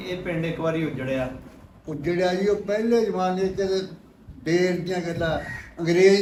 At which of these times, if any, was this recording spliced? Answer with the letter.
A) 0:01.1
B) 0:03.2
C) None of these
C